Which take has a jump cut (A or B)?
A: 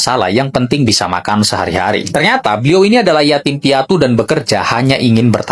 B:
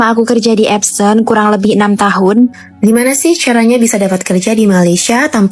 B